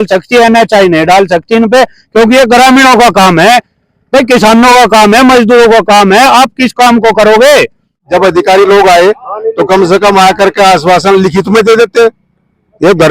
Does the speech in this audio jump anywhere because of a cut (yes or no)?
yes